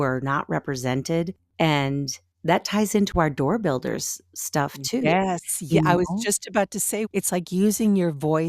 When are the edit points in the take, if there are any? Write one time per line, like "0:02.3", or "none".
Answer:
0:01.4